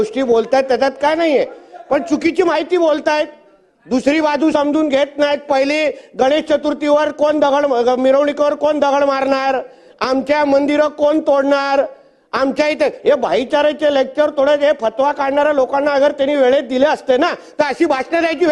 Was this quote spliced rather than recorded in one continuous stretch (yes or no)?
no